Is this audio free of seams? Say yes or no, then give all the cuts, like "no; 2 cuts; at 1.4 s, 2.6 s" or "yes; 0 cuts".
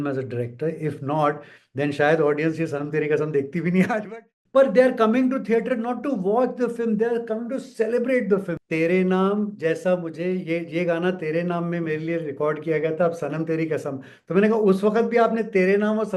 no; 2 cuts; at 4.0 s, 8.5 s